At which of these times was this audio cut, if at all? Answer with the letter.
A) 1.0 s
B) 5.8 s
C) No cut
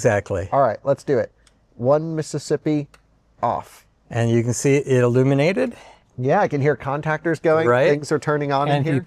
C